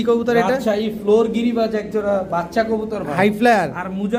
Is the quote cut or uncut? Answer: uncut